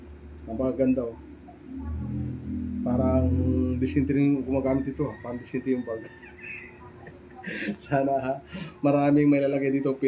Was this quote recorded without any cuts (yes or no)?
yes